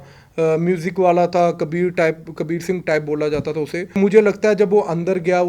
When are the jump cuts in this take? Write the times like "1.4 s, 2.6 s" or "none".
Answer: 3.9 s